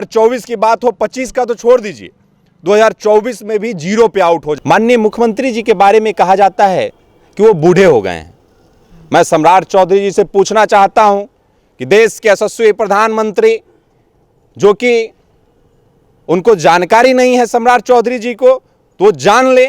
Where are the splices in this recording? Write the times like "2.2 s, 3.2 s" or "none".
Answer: 4.5 s

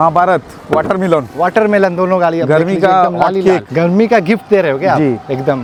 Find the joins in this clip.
none

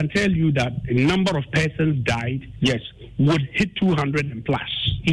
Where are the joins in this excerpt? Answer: none

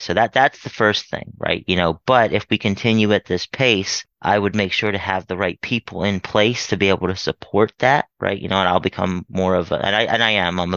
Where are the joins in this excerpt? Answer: none

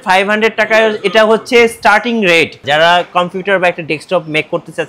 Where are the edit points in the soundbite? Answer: 2.6 s

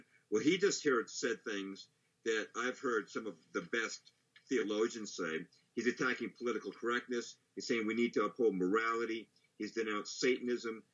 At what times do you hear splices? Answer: none

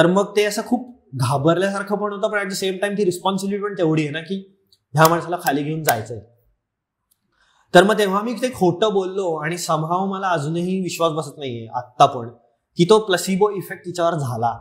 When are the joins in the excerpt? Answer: none

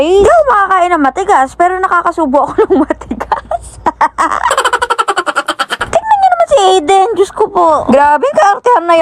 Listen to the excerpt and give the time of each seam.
5.7 s

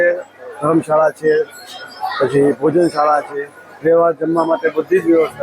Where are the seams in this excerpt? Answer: none

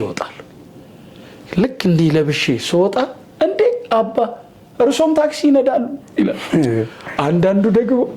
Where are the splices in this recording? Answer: none

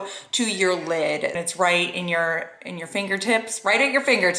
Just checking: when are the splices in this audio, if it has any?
1.4 s

